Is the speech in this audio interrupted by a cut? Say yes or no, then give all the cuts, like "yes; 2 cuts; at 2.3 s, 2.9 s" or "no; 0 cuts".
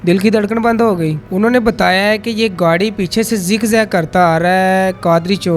yes; 1 cut; at 1.2 s